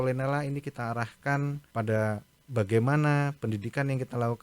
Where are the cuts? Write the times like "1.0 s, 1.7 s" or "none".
1.6 s

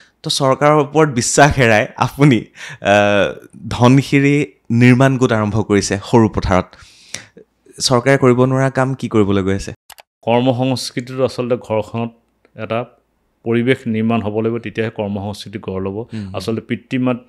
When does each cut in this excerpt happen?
9.7 s

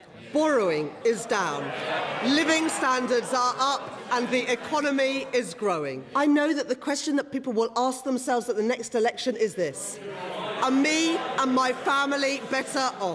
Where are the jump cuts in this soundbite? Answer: 6.0 s

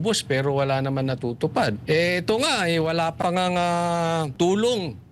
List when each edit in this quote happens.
1.8 s, 3.2 s, 4.3 s

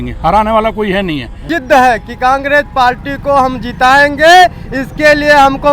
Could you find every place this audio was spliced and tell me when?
1.3 s

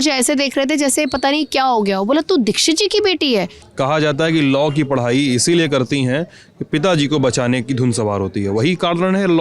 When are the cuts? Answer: 3.6 s

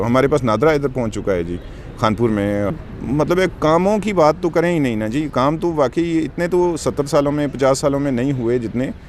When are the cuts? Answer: 2.8 s

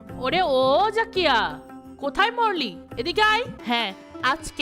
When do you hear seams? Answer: 3.6 s

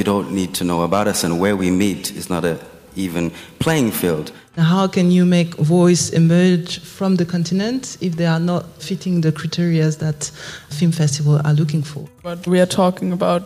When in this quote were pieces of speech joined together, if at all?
4.6 s, 8.8 s, 10.7 s, 12.5 s

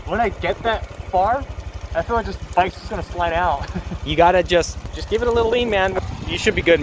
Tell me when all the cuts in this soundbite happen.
4.8 s, 6.0 s

